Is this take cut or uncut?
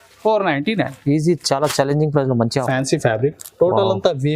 cut